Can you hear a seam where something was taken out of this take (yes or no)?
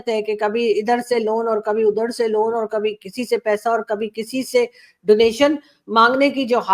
no